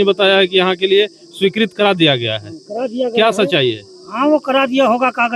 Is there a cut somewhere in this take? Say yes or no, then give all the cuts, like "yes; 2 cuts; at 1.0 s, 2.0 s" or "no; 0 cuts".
no; 0 cuts